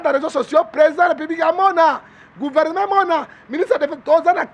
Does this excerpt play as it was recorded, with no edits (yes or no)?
yes